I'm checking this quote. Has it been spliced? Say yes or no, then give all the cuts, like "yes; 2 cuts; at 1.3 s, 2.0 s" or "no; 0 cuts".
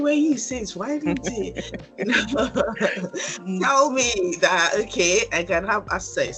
no; 0 cuts